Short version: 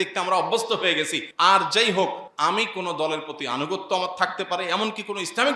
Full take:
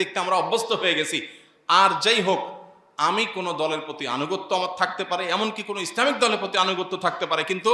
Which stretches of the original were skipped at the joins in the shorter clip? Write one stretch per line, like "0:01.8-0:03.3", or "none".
0:01.2-0:01.5
0:02.6-0:02.9